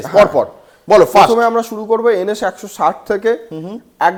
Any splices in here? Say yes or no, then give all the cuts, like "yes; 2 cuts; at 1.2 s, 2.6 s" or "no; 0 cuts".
no; 0 cuts